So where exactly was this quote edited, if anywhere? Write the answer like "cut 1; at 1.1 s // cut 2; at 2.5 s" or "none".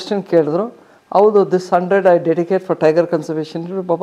none

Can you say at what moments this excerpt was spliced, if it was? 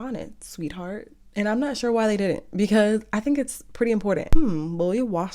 cut 1; at 4.3 s

